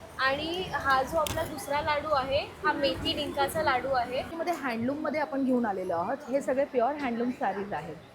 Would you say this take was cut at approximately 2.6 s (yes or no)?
no